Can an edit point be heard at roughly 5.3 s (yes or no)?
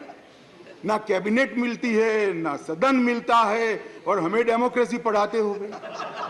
no